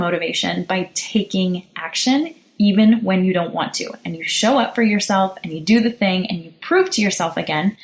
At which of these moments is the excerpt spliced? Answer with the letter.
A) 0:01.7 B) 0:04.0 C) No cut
C